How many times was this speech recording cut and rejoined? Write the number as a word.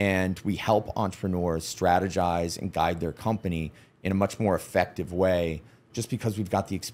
one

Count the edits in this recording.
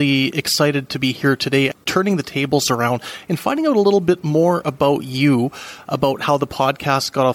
one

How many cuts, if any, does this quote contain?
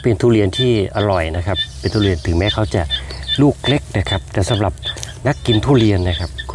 zero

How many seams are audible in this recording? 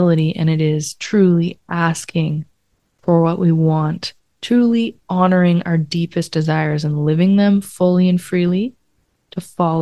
zero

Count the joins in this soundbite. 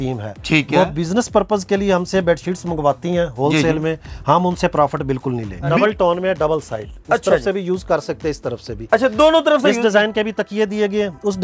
one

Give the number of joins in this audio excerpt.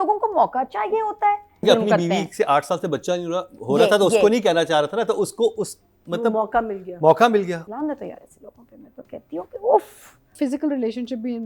three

